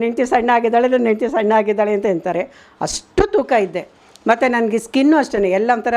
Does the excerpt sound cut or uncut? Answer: uncut